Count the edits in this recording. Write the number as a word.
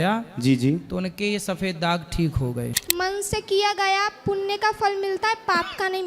one